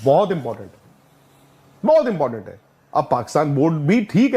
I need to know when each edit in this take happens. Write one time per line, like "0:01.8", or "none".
0:02.7